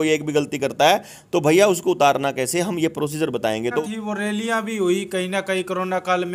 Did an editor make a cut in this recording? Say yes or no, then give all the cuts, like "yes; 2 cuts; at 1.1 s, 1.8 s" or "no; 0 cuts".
yes; 1 cut; at 3.9 s